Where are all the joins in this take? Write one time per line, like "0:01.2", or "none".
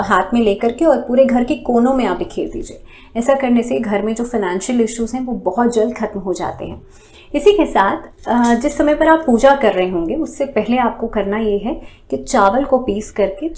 none